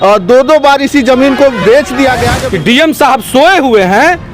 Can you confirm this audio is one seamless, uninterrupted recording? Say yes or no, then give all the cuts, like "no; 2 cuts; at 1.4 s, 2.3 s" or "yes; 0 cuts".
no; 1 cut; at 2.4 s